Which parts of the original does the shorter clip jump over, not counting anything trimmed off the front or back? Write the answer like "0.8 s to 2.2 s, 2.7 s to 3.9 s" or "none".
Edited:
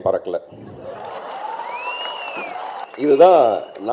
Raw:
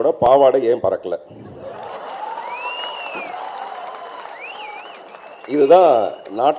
3.6 s to 5.4 s